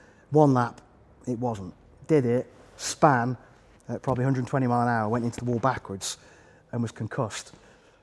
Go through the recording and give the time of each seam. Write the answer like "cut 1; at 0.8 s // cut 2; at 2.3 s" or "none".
none

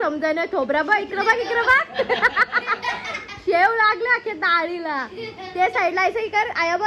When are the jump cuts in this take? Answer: none

